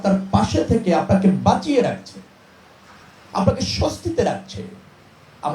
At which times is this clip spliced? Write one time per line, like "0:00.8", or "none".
none